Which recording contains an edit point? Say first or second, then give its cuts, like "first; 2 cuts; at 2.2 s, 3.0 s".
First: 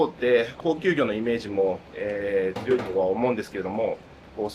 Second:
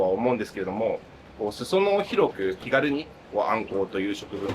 second; 1 cut; at 2.6 s